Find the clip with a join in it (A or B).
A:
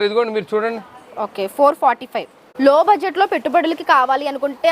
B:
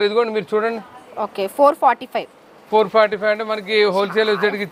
A